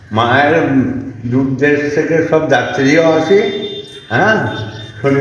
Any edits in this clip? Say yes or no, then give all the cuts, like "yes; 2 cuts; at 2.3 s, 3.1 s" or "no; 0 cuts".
no; 0 cuts